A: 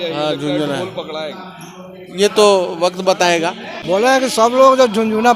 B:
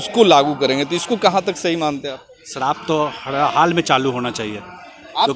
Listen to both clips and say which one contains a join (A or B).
A